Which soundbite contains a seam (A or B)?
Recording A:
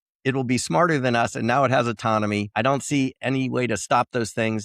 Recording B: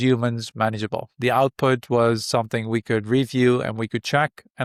A